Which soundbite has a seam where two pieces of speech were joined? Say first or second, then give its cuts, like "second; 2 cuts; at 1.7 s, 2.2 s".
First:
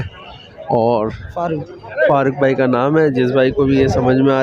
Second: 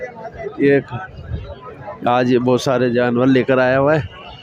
first; 1 cut; at 1.5 s